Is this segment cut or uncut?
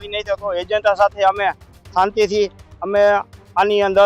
uncut